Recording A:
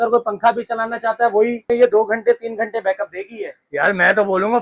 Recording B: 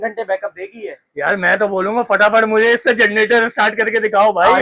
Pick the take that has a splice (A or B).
A